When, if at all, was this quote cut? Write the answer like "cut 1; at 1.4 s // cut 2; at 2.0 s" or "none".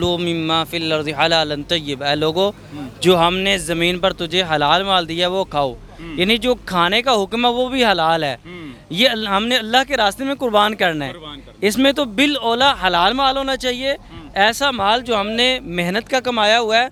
none